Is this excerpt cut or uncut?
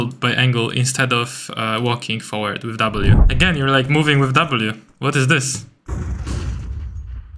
cut